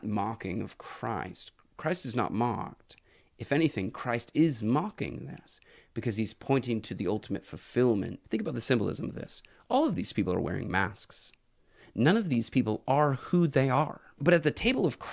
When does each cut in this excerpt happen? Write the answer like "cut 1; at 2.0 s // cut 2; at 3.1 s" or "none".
cut 1; at 8.2 s // cut 2; at 14.2 s